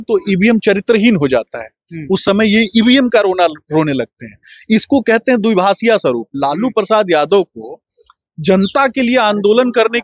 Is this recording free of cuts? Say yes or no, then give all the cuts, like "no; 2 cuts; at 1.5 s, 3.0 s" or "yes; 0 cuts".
yes; 0 cuts